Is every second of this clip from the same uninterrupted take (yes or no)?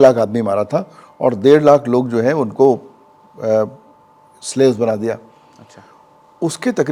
yes